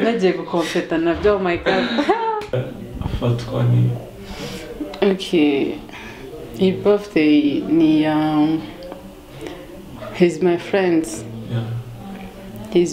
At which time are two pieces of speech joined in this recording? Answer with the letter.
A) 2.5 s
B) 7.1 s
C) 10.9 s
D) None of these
A